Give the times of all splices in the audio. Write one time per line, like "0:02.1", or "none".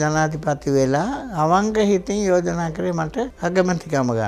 0:03.3

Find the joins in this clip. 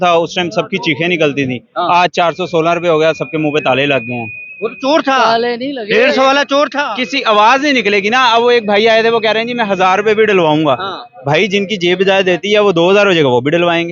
none

